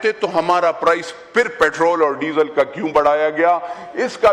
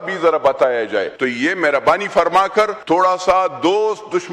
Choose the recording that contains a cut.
second; 2 cuts; at 1.1 s, 2.8 s

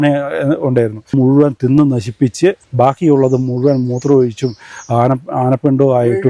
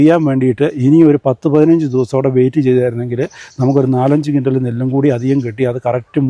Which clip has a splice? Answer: first; 2 cuts; at 1.1 s, 2.7 s

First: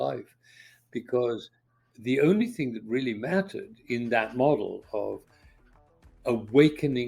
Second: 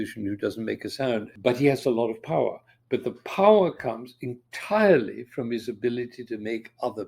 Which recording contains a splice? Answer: second; 1 cut; at 1.3 s

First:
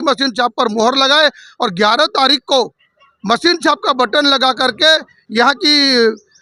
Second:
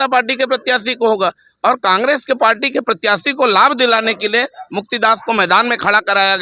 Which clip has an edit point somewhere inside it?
second; 1 cut; at 2.6 s

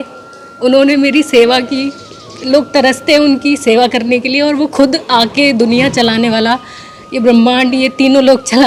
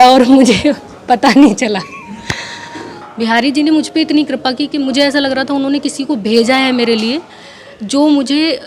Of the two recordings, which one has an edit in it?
second; 1 cut; at 2.9 s

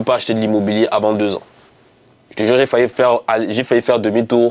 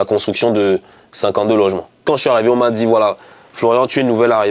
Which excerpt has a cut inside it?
second; 1 cut; at 2.0 s

